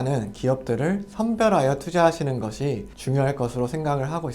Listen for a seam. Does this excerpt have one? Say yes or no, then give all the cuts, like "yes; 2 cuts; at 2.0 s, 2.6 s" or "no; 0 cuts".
yes; 1 cut; at 2.9 s